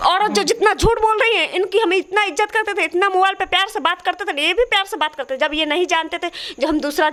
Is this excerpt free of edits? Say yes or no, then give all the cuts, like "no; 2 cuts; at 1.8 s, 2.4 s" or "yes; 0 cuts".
yes; 0 cuts